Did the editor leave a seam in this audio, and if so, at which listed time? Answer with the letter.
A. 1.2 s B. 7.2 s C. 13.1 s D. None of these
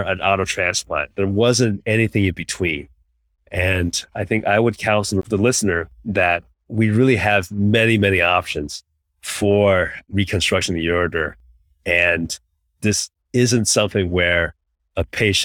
C